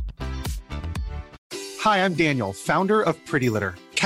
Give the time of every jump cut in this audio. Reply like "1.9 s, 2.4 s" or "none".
1.4 s